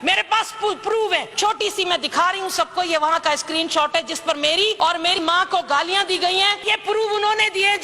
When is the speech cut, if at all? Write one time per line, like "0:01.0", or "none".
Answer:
0:01.3
0:04.8
0:06.7